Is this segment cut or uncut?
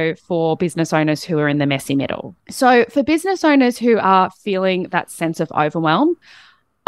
cut